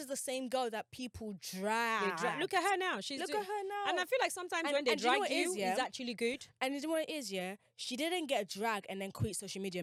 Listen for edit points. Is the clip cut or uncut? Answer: uncut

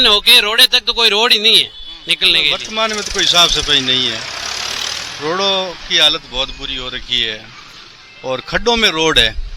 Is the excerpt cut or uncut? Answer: cut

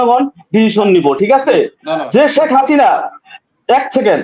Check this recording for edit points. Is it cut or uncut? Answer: uncut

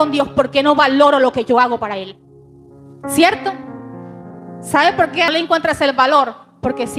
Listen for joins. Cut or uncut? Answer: cut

